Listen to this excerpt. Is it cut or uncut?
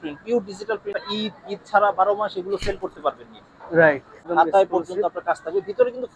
cut